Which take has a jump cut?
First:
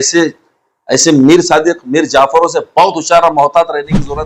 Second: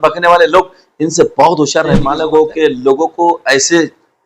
second; 1 cut; at 2.0 s

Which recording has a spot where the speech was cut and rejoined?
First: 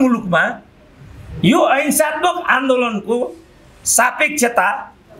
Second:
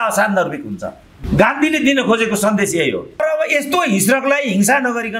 second; 2 cuts; at 1.1 s, 3.2 s

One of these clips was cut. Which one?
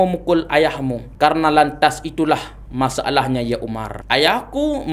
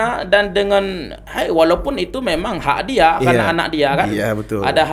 first; 2 cuts; at 1.0 s, 3.9 s

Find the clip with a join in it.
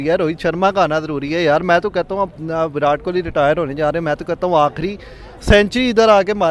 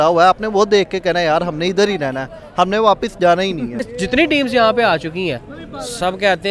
second; 1 cut; at 3.9 s

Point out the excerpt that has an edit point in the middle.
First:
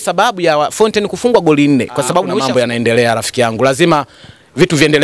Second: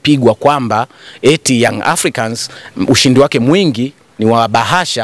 first; 1 cut; at 2.3 s

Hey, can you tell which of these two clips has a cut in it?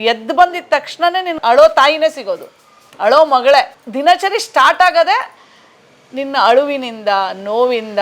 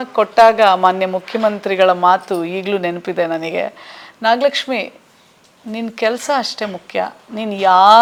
first; 2 cuts; at 1.3 s, 3.8 s

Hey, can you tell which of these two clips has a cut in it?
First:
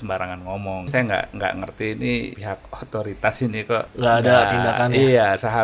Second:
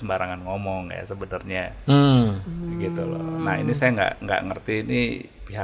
first; 3 cuts; at 0.9 s, 2.4 s, 3.9 s

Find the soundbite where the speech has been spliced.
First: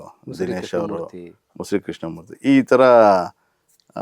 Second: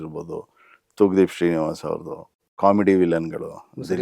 second; 1 cut; at 2.4 s

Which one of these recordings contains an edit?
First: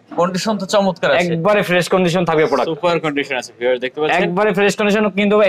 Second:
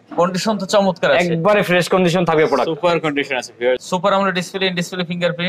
second; 1 cut; at 3.8 s

